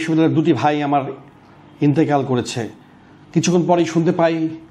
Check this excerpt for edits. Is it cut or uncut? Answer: uncut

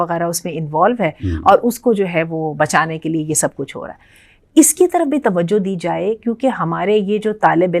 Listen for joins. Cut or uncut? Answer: uncut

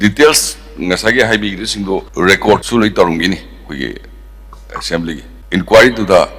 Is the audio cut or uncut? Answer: uncut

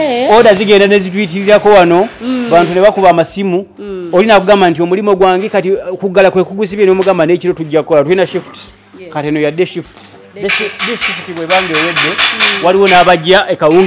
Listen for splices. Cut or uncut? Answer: uncut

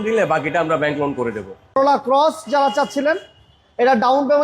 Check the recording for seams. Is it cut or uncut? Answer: cut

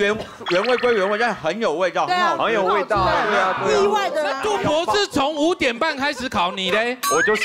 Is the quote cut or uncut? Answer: cut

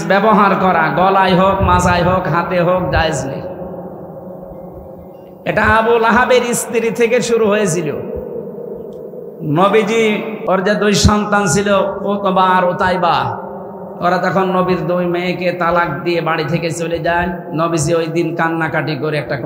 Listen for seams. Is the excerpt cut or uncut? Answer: cut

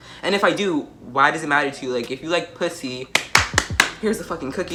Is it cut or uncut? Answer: uncut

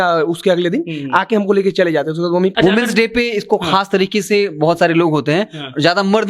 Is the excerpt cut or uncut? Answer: cut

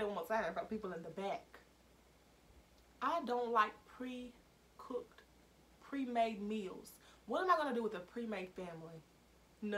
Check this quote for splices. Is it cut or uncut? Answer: uncut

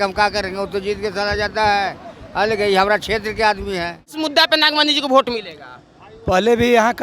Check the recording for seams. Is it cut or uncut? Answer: cut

